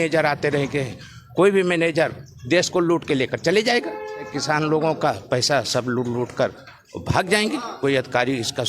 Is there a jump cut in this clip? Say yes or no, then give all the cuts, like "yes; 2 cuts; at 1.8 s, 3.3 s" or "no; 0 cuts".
yes; 1 cut; at 4.3 s